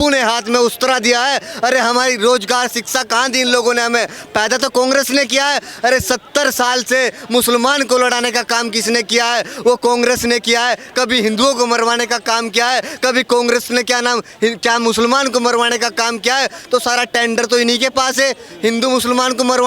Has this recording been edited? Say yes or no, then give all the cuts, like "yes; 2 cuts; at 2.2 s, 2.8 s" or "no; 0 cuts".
no; 0 cuts